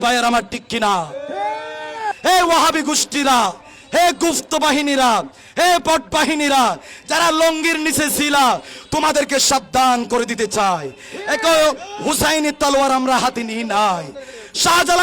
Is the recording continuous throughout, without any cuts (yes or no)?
no